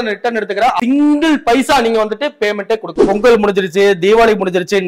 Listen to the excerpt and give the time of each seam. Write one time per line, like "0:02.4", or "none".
0:00.8
0:03.0